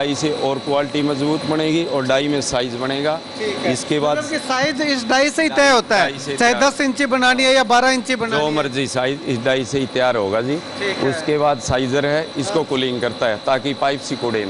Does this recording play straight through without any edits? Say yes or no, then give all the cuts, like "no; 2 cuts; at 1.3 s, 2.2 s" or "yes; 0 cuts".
yes; 0 cuts